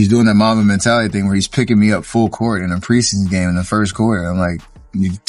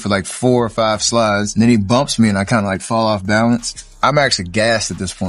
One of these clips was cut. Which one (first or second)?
second